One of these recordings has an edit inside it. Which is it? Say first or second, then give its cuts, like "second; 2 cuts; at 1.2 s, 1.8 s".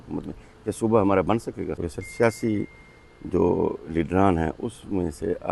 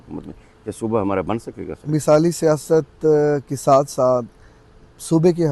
first; 1 cut; at 1.8 s